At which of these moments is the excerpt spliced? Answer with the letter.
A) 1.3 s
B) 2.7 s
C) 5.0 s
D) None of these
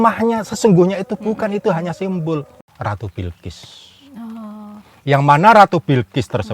B